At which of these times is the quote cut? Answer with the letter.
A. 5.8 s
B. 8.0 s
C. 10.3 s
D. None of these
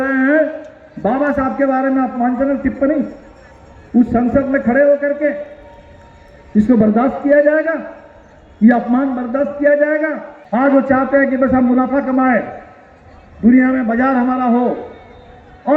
C